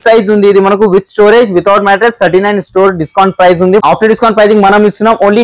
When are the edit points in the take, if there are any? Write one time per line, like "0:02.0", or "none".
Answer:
none